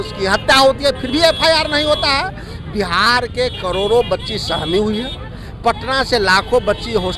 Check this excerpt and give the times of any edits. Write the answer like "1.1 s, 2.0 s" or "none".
none